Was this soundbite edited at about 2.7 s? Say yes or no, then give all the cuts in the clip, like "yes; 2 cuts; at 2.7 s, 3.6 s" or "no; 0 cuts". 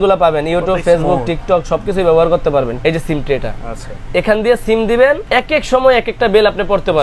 yes; 2 cuts; at 2.7 s, 5.2 s